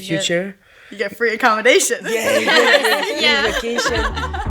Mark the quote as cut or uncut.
uncut